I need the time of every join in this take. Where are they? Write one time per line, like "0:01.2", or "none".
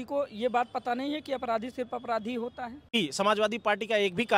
0:02.9